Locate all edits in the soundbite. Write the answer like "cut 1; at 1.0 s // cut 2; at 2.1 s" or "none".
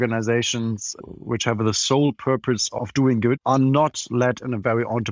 cut 1; at 1.3 s // cut 2; at 3.4 s